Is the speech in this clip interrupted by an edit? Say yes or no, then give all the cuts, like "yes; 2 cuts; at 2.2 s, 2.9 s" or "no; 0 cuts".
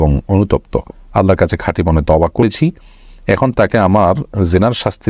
yes; 1 cut; at 2.4 s